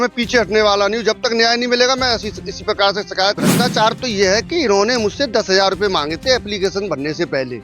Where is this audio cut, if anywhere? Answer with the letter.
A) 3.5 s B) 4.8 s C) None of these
A